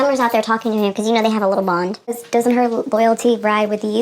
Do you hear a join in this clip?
yes; 1 cut; at 2.1 s

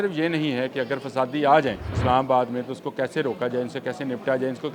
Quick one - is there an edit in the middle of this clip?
yes; 1 cut; at 1.9 s

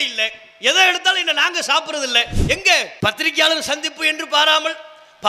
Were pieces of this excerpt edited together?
no; 0 cuts

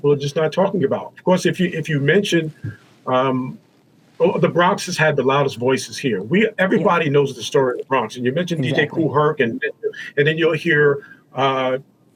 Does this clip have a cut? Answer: no; 0 cuts

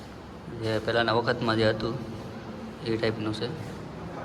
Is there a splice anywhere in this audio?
no; 0 cuts

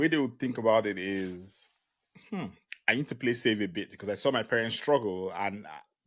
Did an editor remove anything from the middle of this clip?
no; 0 cuts

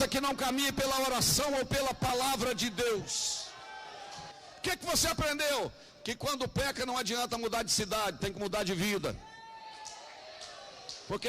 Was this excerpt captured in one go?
no; 1 cut; at 4.1 s

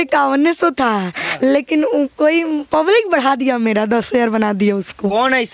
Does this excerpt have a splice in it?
no; 0 cuts

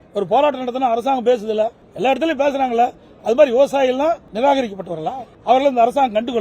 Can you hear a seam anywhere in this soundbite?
yes; 3 cuts; at 1.8 s, 4.3 s, 5.3 s

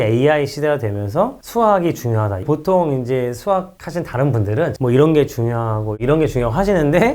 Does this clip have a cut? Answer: yes; 2 cuts; at 2.3 s, 4.7 s

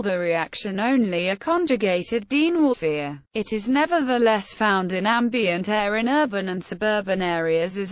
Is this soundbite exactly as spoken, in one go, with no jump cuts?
yes; 0 cuts

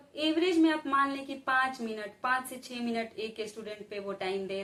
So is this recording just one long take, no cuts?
yes; 0 cuts

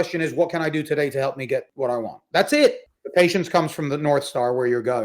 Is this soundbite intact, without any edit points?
no; 2 cuts; at 1.7 s, 2.9 s

